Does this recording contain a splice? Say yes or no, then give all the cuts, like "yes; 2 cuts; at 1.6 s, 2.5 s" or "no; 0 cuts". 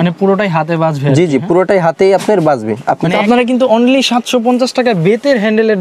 yes; 1 cut; at 3.2 s